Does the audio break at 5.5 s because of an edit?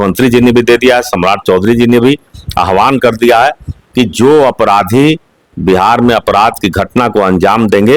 no; 0 cuts

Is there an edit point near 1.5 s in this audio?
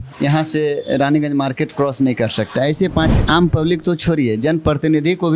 no; 1 cut; at 3.1 s

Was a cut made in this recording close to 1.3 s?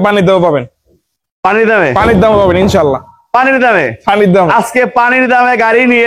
no; 0 cuts

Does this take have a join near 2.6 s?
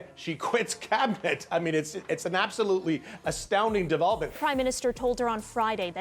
no; 1 cut; at 4.3 s

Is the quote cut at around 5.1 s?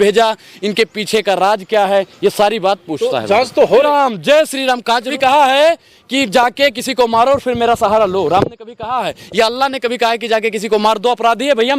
yes; 2 cuts; at 3.8 s, 5.1 s

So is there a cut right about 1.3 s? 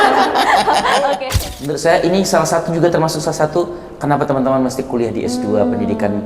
yes; 1 cut; at 1.3 s

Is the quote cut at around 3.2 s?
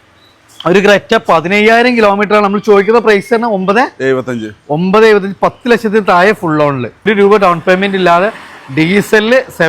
no; 1 cut; at 7.1 s

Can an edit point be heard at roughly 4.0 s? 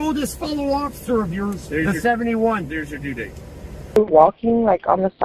yes; 1 cut; at 4.0 s

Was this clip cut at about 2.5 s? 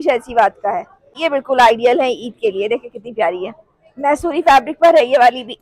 no; 1 cut; at 1.1 s

